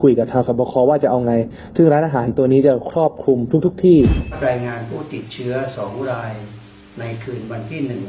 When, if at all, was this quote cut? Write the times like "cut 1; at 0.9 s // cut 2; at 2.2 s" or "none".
cut 1; at 4.3 s